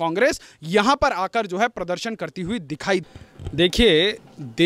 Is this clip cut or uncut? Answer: cut